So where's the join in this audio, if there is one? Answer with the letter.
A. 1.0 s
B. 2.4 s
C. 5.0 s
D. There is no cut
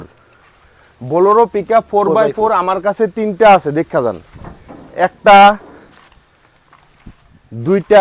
D